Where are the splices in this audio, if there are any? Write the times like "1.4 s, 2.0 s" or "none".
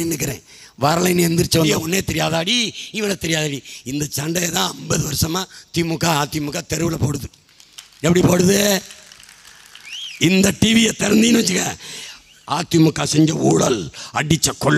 1.7 s